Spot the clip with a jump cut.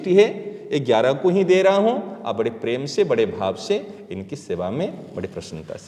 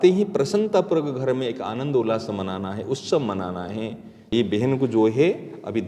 second; 1 cut; at 4.3 s

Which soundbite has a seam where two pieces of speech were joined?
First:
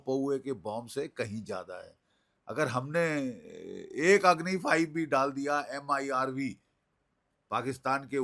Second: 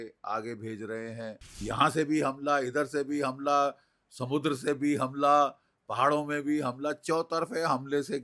second; 1 cut; at 1.6 s

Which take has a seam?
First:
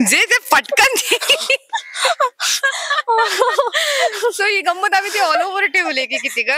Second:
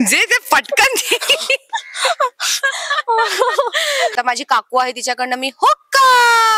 second; 1 cut; at 4.1 s

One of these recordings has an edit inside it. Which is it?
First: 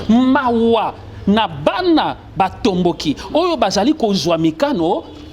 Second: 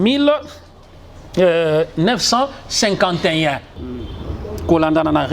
second; 1 cut; at 3.8 s

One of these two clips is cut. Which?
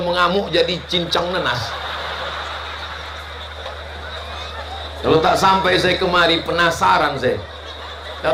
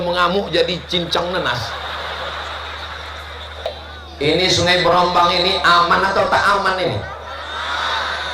second; 1 cut; at 3.6 s

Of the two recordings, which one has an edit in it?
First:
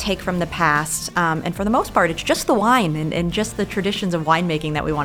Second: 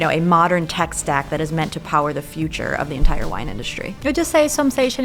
second; 1 cut; at 3.9 s

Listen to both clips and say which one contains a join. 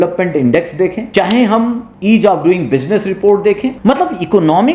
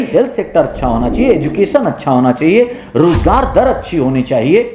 first; 3 cuts; at 1.0 s, 1.9 s, 3.7 s

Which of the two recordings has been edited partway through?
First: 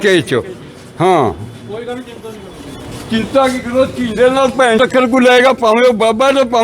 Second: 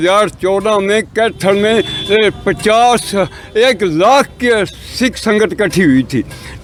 first; 1 cut; at 4.8 s

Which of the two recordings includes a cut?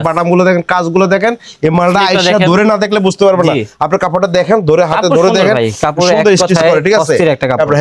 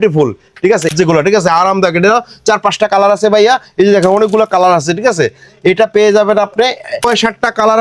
second; 2 cuts; at 0.9 s, 7.0 s

